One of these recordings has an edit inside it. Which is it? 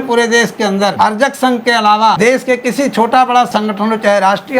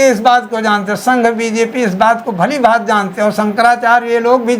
first; 3 cuts; at 0.9 s, 2.2 s, 3.5 s

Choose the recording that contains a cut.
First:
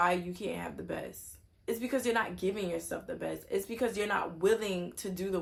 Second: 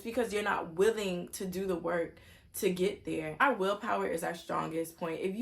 second; 1 cut; at 3.4 s

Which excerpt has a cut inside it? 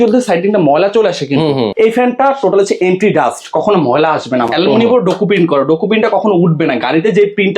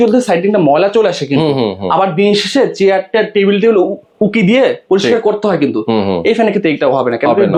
first; 2 cuts; at 1.7 s, 4.5 s

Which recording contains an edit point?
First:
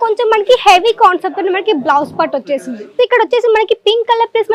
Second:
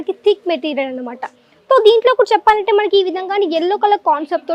first; 1 cut; at 2.8 s

